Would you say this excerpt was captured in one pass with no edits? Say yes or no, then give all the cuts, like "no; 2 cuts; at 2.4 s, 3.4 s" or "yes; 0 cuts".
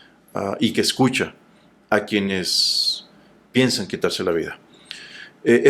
yes; 0 cuts